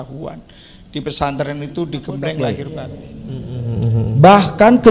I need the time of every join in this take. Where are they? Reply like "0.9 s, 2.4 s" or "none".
2.5 s